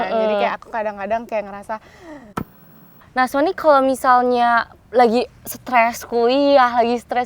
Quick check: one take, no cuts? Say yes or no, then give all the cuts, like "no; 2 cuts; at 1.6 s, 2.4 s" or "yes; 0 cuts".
no; 1 cut; at 2.7 s